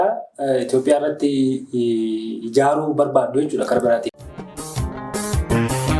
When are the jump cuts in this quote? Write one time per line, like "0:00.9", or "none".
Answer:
none